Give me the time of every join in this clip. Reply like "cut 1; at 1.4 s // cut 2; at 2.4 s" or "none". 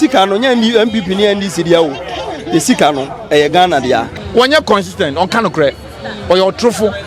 cut 1; at 4.1 s

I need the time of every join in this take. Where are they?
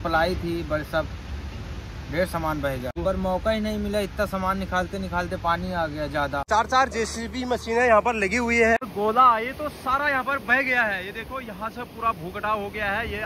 cut 1; at 3.0 s // cut 2; at 6.4 s // cut 3; at 8.8 s

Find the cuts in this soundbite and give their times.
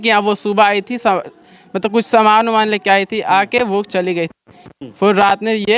none

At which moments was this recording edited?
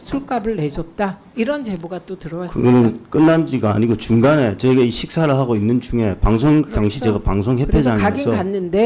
none

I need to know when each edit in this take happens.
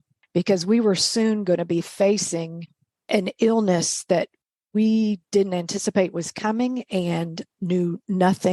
cut 1; at 7.4 s

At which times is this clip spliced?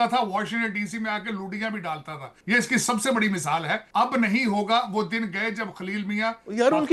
none

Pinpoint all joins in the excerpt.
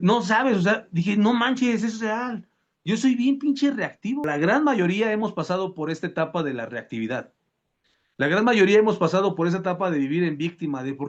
cut 1; at 4.2 s

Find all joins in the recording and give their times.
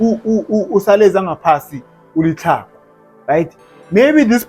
none

